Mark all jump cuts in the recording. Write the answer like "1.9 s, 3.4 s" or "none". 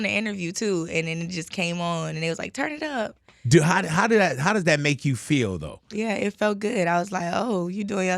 5.9 s